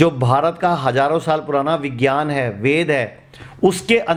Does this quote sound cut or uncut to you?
uncut